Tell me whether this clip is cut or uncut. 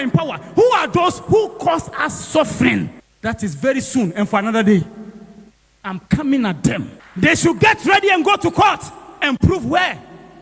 uncut